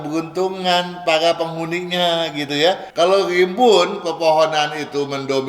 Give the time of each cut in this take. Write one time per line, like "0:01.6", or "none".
0:02.9

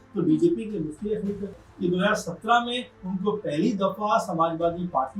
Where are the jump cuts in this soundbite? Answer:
0:01.6

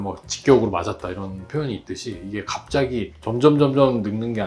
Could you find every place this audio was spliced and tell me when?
none

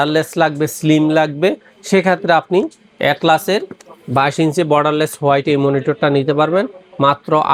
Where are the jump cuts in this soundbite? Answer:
none

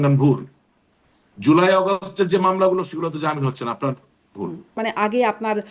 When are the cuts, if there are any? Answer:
0:04.8

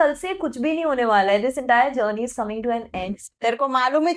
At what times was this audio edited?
0:03.2

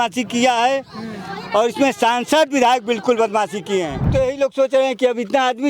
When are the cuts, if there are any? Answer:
0:04.1

